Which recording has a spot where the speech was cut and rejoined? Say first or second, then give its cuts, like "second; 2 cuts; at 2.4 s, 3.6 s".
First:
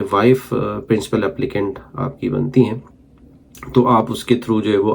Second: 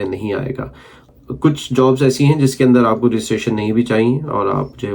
second; 1 cut; at 1.0 s